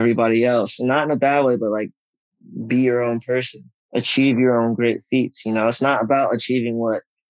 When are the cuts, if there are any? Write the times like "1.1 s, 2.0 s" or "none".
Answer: none